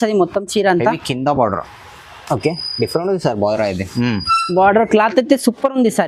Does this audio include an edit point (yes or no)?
no